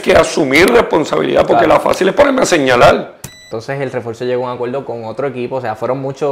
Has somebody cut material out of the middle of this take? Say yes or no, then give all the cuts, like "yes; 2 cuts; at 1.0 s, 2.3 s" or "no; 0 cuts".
yes; 1 cut; at 3.4 s